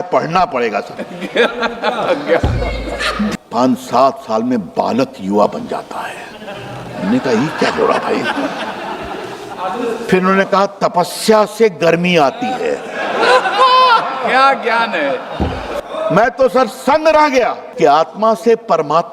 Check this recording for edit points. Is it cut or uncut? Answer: cut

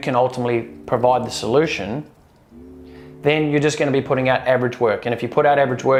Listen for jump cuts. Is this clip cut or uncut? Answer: uncut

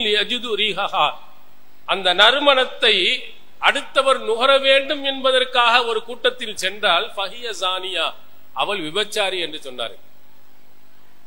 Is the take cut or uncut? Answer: uncut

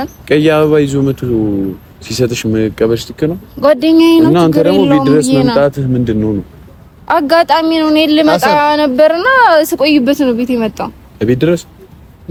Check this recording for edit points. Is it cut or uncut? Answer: uncut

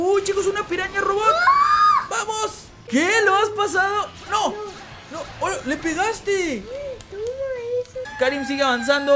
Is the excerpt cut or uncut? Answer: cut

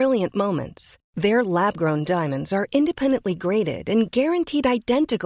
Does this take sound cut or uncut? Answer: uncut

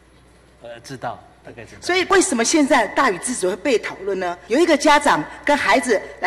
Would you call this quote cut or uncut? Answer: cut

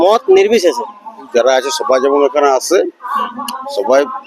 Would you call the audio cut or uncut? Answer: cut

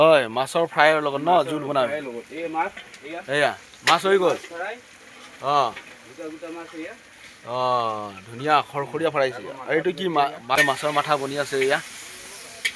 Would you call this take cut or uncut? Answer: cut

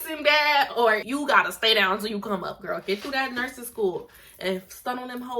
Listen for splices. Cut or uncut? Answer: cut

